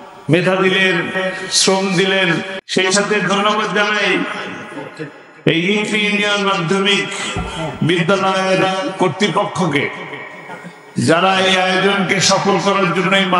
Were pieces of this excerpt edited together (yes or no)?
yes